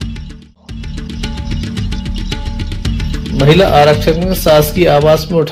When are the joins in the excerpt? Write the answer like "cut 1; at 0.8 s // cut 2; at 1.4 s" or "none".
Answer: none